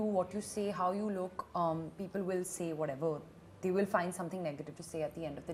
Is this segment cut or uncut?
uncut